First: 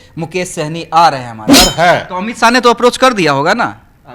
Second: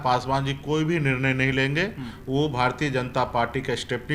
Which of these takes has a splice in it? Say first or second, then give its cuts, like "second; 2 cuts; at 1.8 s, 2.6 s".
first; 1 cut; at 1.5 s